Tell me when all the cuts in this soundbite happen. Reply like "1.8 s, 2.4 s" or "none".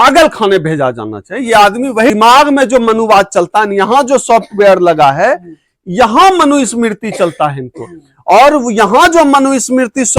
2.1 s